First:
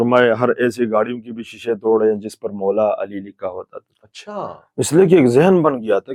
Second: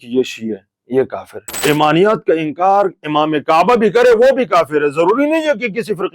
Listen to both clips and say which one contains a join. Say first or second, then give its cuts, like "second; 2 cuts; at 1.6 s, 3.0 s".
second; 1 cut; at 1.6 s